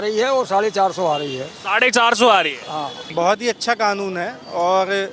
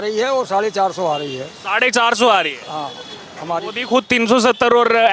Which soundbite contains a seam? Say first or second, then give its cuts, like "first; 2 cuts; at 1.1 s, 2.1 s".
first; 1 cut; at 3.0 s